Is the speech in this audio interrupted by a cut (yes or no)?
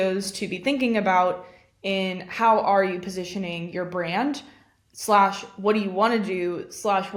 no